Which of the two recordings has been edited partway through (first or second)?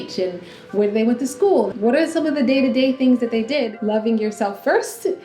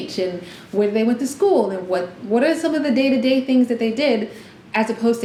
first